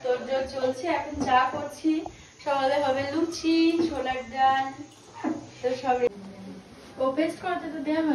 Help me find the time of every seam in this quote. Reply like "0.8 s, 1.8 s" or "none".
6.1 s